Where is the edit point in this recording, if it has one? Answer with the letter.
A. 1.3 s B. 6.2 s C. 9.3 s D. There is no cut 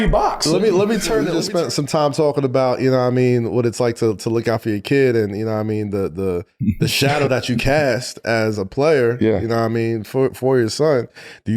A